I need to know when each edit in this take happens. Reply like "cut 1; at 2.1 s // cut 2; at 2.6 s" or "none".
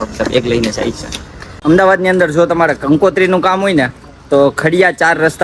cut 1; at 1.5 s